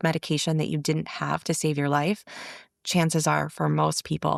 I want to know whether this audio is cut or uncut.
uncut